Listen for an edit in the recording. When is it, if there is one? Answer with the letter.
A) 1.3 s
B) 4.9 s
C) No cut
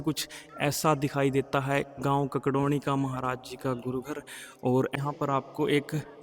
B